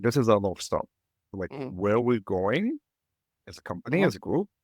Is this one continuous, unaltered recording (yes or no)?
no